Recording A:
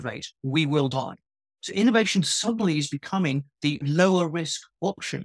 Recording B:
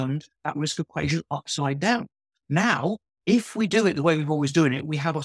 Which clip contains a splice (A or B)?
A